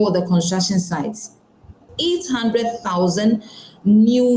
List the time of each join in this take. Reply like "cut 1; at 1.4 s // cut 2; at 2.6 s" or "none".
cut 1; at 1.9 s